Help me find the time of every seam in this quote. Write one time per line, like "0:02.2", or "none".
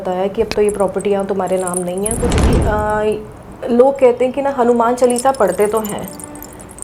0:02.5